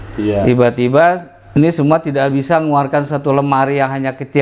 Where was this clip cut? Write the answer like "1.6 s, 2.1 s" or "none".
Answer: none

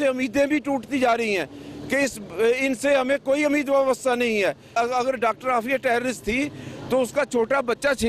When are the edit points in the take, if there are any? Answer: 4.7 s

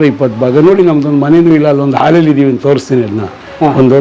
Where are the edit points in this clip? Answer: none

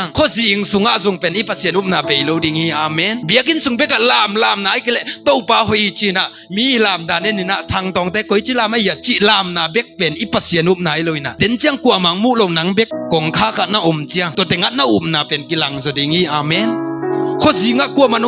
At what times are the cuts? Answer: none

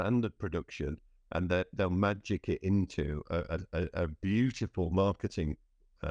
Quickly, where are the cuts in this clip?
none

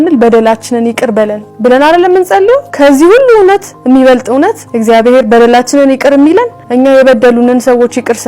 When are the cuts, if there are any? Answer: 1.4 s, 2.7 s, 4.7 s, 6.6 s

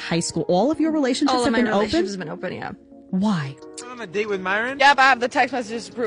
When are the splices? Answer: 4.0 s

